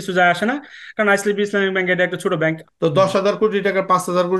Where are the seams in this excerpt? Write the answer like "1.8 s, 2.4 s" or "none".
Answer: 2.7 s

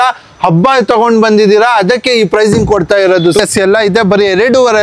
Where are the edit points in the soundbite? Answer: 3.4 s

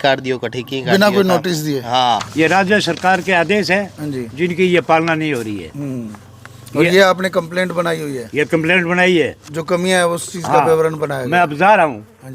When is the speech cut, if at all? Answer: 2.3 s

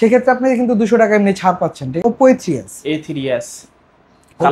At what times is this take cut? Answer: 2.0 s

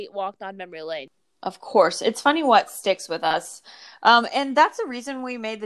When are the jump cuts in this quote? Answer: 1.1 s

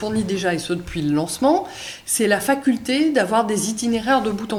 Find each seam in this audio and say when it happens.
none

